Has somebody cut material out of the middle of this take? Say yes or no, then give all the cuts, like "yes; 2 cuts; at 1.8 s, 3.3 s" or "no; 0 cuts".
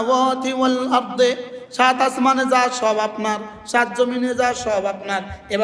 no; 0 cuts